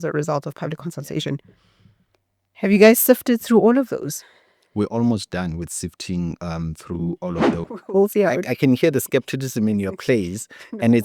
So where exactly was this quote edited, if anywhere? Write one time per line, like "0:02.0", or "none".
0:07.6